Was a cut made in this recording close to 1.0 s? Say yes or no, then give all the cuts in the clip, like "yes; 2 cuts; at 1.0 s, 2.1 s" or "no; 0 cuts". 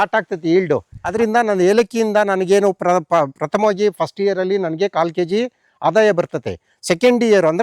yes; 1 cut; at 1.0 s